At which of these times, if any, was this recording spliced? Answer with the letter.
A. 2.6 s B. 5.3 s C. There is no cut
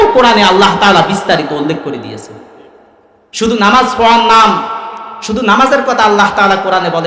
C